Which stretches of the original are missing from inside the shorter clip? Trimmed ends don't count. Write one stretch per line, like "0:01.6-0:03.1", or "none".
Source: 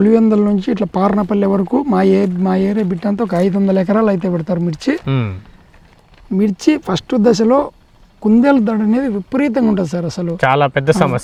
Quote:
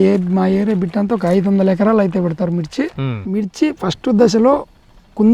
0:05.3-0:06.2